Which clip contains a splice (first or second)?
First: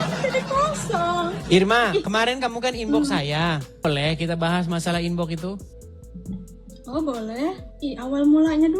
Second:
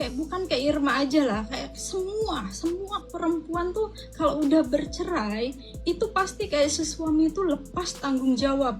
first